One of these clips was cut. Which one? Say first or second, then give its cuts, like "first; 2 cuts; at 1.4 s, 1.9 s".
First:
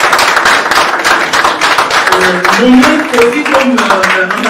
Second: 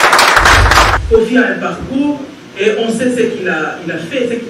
second; 1 cut; at 1.0 s